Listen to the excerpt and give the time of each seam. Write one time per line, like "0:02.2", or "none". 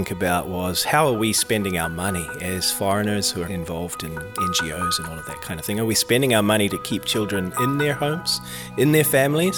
none